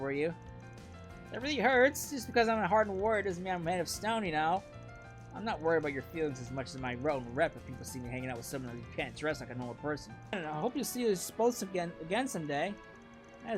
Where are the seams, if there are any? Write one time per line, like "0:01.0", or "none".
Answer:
0:10.4